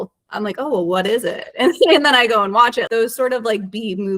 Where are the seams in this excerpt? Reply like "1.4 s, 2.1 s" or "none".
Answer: 2.9 s